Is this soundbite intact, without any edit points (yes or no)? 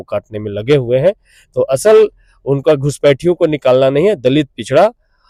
yes